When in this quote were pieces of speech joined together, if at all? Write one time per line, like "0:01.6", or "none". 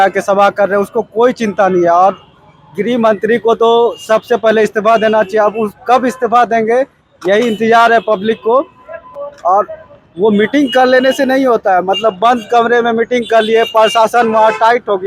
none

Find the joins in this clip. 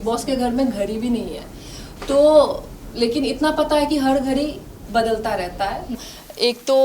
0:05.9

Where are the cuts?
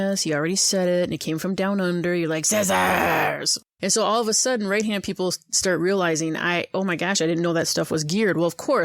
0:03.6

